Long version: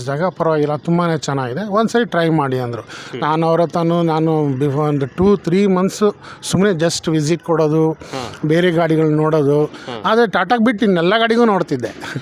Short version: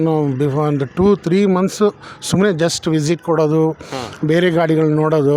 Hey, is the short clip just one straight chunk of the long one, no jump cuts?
yes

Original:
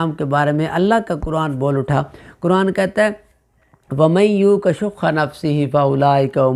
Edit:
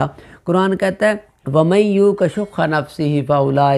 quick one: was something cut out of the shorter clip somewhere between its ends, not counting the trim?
yes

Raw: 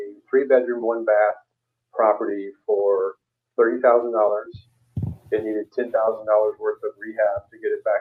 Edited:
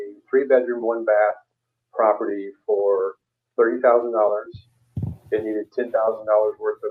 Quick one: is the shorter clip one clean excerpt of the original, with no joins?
yes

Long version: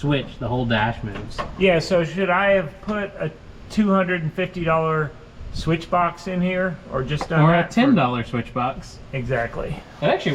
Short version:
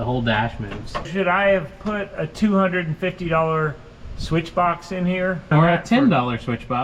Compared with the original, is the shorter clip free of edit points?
no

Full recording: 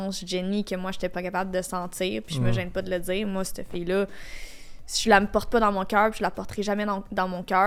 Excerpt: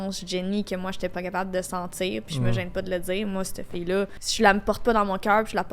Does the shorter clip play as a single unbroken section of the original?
no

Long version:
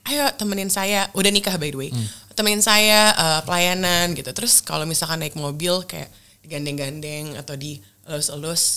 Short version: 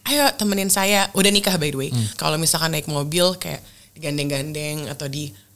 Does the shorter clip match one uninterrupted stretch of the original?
no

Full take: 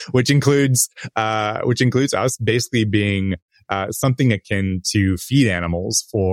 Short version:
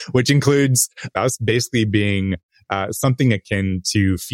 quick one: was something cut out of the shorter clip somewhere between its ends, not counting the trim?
yes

